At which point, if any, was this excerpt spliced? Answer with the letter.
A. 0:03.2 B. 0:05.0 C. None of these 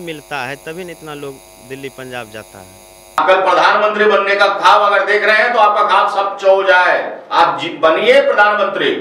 A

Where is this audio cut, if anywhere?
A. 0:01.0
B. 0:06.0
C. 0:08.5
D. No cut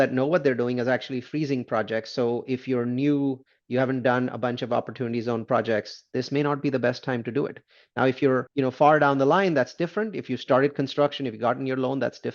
C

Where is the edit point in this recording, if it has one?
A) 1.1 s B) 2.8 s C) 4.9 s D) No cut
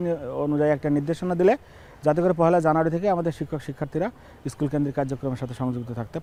D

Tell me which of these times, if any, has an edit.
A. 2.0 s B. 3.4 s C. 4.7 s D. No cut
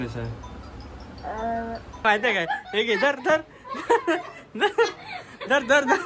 A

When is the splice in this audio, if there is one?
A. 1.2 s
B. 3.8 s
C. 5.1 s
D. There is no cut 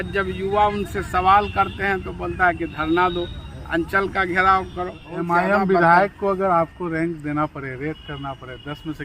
C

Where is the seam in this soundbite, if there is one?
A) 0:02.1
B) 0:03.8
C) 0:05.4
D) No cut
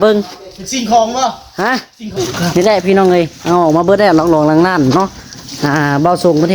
A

